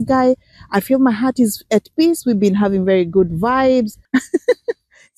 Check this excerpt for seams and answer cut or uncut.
cut